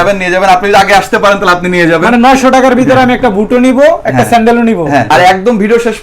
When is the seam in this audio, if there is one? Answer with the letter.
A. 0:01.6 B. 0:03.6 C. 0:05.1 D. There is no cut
C